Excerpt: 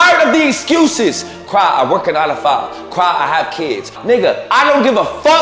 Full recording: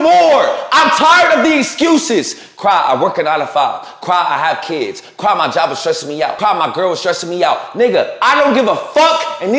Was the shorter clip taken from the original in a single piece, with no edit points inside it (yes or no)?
no